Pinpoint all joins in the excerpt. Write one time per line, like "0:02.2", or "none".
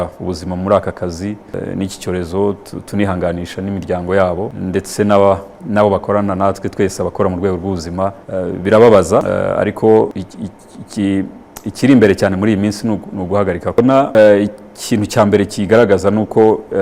0:01.6
0:04.5
0:08.2
0:09.3
0:10.2
0:13.7